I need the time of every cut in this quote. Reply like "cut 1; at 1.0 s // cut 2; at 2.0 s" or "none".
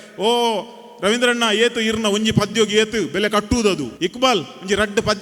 cut 1; at 3.9 s